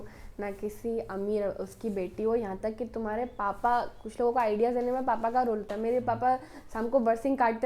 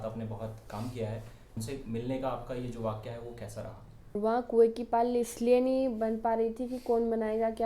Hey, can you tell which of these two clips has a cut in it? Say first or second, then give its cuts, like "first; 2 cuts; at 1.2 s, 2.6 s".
second; 2 cuts; at 1.6 s, 4.2 s